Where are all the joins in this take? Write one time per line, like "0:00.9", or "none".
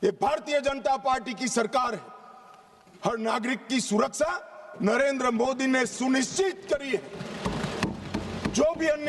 none